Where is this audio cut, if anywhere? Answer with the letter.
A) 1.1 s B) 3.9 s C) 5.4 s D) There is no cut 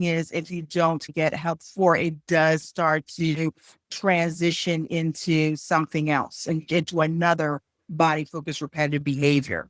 A